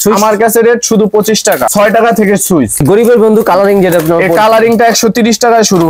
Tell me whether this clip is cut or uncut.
cut